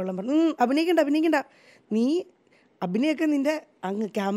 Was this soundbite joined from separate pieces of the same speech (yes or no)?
no